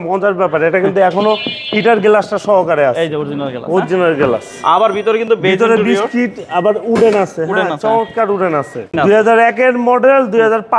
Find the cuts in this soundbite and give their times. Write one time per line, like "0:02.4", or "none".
0:08.9